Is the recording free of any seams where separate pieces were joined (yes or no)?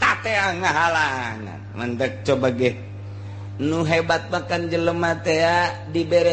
yes